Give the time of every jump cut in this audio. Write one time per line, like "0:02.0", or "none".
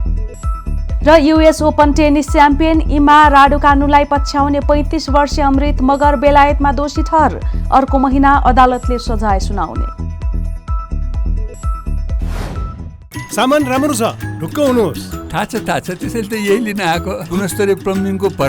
0:12.8